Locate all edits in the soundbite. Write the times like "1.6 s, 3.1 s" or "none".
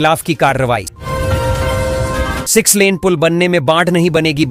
0.9 s, 2.4 s